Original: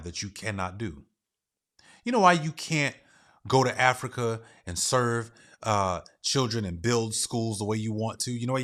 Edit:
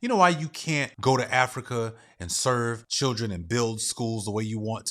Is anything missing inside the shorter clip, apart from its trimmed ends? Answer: yes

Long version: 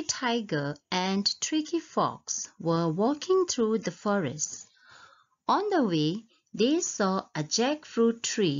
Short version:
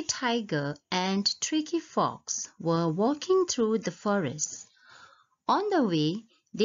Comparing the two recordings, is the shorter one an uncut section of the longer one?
yes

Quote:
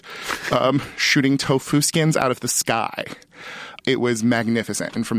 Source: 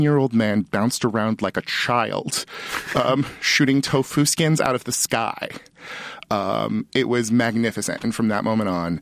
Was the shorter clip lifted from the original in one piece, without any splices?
no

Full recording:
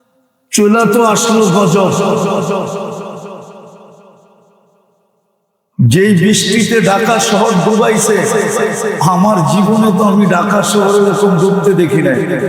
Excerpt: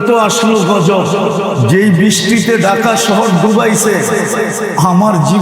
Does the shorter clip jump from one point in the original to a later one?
yes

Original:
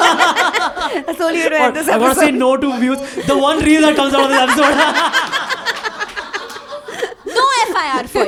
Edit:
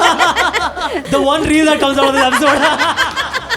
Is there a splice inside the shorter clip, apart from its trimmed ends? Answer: yes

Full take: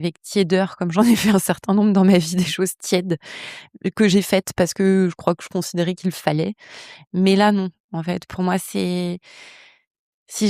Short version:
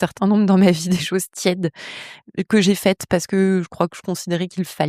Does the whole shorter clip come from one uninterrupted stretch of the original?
yes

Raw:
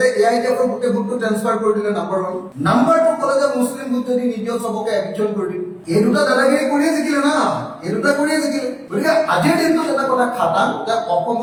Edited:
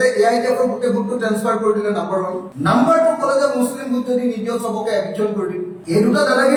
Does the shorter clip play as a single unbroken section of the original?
yes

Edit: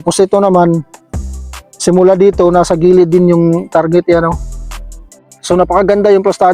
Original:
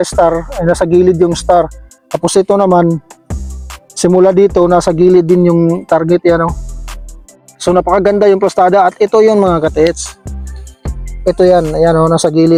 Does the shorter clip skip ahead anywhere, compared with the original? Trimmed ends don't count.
no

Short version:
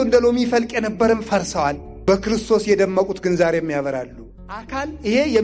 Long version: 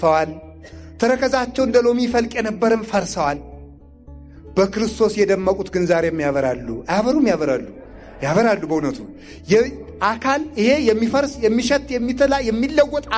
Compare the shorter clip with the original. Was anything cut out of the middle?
yes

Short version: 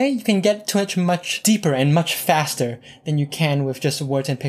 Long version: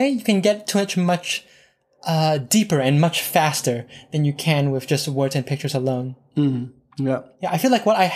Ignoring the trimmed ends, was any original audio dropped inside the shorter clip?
yes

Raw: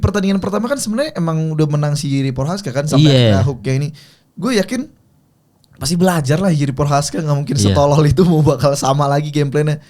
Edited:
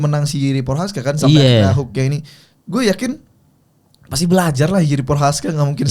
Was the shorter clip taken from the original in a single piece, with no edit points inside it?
yes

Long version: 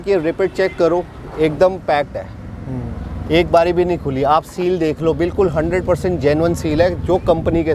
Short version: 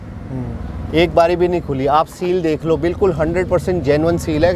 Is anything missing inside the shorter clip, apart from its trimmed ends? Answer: no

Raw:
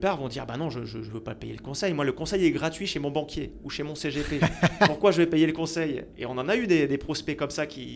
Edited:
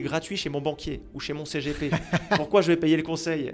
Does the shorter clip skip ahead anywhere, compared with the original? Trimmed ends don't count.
no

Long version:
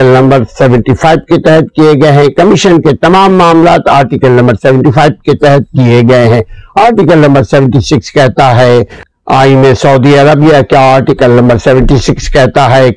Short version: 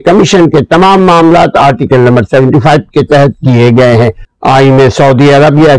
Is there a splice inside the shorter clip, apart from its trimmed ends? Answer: yes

